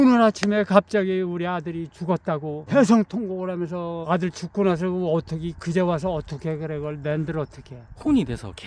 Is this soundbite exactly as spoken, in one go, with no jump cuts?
no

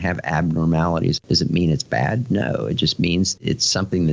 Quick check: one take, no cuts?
no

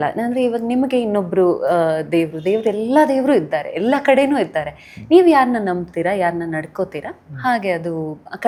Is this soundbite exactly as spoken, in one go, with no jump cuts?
yes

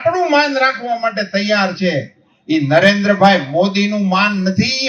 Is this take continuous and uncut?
yes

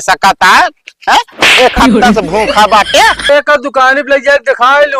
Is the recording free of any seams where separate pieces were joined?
no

